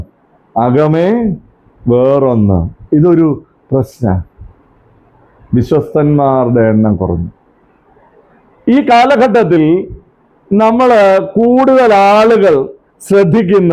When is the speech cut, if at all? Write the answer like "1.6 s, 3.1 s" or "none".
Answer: none